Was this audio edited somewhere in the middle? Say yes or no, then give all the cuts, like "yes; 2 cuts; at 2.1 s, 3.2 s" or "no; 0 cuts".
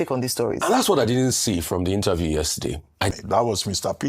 yes; 1 cut; at 3.1 s